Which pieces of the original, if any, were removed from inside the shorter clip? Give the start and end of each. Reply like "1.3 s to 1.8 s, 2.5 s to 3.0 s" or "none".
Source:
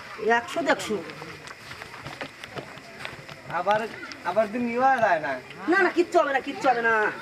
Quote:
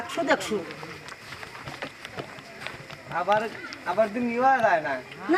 none

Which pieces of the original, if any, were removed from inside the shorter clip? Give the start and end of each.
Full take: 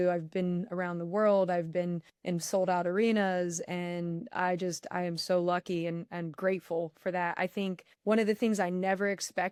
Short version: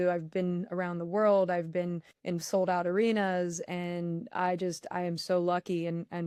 none

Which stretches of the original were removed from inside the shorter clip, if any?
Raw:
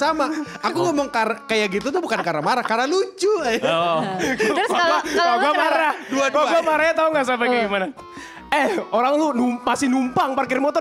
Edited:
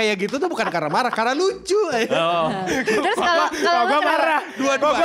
none

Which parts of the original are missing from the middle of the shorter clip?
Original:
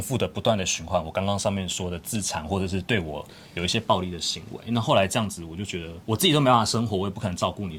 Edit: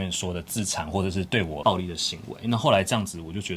3.2 s to 3.8 s

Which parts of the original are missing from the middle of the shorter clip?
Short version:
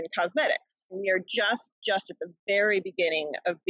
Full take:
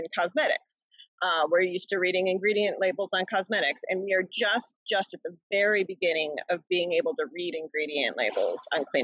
1.0 s to 4.0 s

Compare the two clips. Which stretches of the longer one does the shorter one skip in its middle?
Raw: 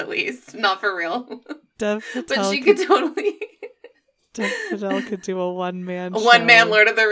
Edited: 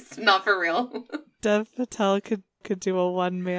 2.6 s to 4.6 s

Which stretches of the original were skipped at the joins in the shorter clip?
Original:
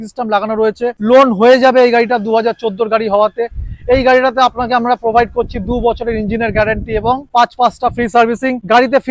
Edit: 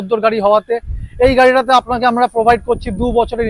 none

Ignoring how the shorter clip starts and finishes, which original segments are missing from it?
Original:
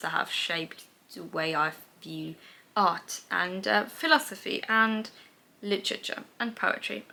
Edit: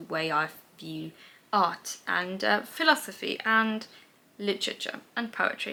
none

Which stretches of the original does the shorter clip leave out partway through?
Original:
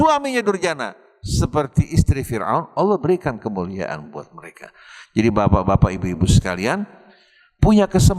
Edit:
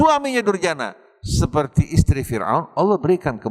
none

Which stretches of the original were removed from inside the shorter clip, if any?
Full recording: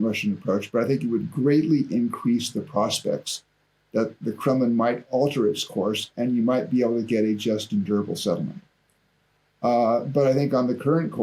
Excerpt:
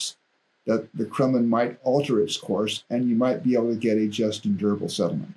none

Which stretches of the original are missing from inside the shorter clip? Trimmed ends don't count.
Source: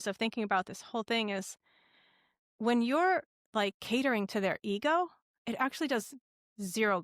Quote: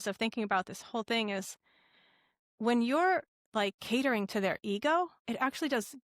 5.2 s to 5.4 s

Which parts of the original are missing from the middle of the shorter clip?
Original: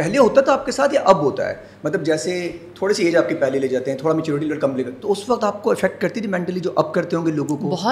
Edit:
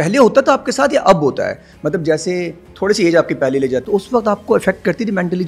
3.8 s to 5.0 s

